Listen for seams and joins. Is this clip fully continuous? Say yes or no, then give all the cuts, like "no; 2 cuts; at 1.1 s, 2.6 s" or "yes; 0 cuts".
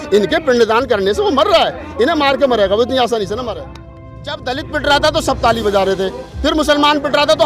no; 1 cut; at 3.8 s